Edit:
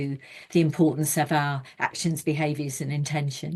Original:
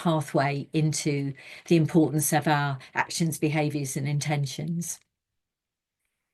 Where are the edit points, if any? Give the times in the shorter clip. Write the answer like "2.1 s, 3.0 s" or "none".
none